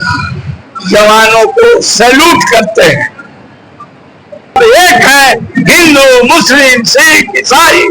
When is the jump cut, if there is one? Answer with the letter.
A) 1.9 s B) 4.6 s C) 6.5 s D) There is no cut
B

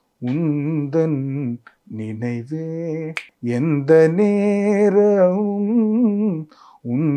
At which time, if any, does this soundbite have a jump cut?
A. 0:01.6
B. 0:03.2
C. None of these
B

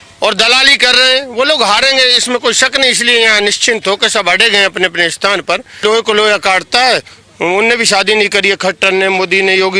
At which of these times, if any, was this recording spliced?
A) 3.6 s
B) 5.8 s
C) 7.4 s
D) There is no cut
B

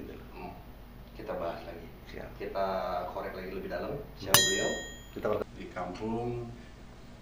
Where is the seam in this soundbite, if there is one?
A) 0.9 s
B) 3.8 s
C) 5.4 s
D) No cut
C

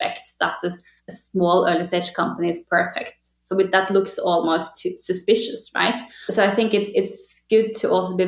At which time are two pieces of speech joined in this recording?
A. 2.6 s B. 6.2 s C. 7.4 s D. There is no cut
B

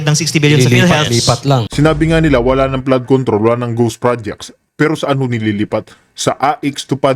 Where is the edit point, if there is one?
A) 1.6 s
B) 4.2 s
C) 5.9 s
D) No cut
A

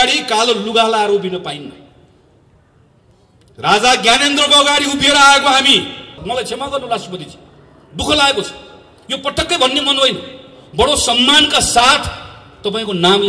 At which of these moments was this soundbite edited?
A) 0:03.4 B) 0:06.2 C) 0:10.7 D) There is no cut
B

